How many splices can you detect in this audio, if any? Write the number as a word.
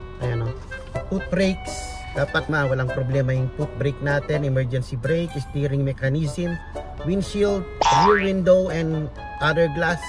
two